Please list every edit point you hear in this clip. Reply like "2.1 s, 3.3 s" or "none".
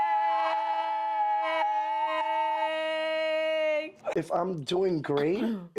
4.0 s